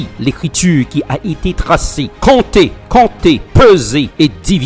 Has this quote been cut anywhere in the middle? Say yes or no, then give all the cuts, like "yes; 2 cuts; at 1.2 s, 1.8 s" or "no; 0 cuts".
no; 0 cuts